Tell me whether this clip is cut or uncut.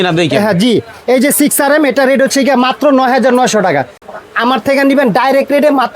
cut